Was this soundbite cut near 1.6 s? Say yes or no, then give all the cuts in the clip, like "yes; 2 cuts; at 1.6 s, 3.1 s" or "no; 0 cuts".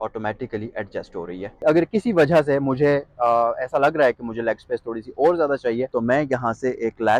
yes; 2 cuts; at 1.6 s, 5.9 s